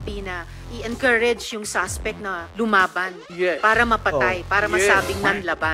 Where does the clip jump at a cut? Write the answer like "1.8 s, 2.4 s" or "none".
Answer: 3.2 s